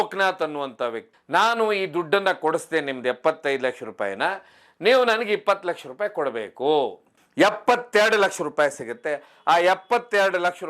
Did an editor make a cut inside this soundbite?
yes; 2 cuts; at 1.1 s, 7.1 s

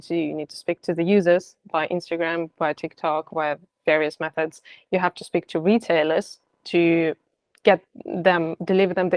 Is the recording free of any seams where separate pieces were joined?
yes; 0 cuts

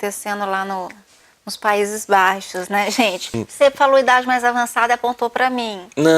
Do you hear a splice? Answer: yes; 1 cut; at 3.4 s

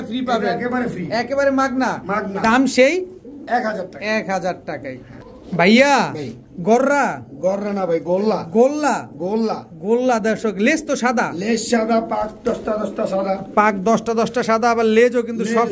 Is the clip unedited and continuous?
yes; 0 cuts

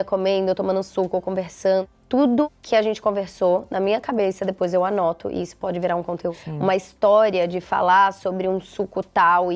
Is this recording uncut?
no; 3 cuts; at 1.9 s, 2.6 s, 6.4 s

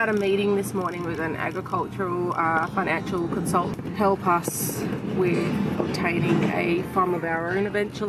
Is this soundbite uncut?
no; 1 cut; at 3.7 s

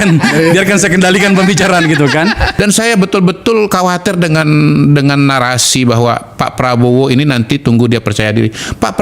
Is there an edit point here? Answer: yes; 1 cut; at 2.5 s

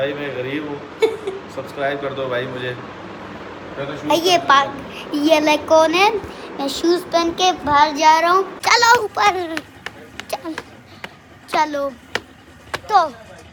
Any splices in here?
no; 0 cuts

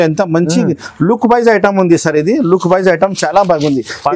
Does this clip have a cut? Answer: no; 0 cuts

